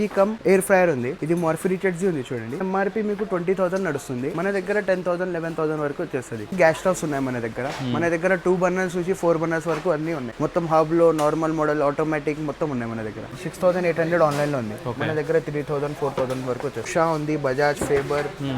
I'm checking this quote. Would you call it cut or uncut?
cut